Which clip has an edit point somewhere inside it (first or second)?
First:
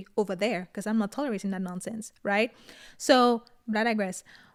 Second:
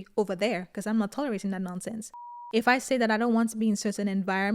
second